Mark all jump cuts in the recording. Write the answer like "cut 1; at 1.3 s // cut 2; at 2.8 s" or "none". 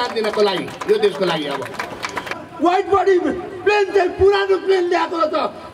cut 1; at 2.4 s